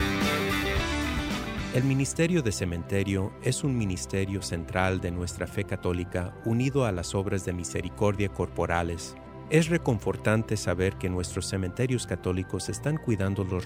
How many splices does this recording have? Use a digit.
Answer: 1